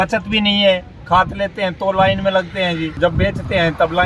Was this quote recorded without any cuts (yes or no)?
no